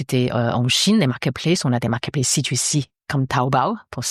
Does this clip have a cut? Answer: no; 0 cuts

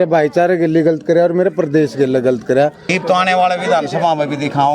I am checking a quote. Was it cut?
yes; 1 cut; at 2.9 s

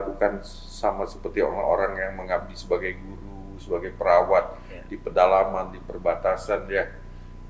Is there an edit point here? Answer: no; 0 cuts

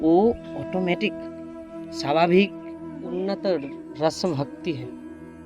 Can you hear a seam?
yes; 1 cut; at 3.0 s

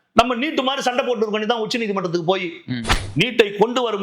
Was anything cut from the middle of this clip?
yes; 1 cut; at 2.9 s

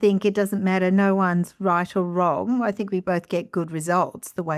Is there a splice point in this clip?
no; 0 cuts

